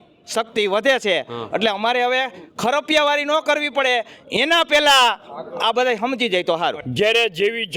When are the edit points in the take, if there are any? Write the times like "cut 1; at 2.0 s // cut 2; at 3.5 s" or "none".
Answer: cut 1; at 6.8 s